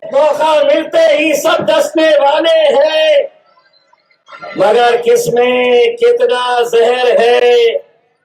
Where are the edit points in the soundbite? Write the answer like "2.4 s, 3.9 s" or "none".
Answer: none